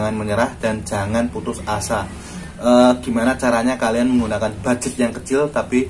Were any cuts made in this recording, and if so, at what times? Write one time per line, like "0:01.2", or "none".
none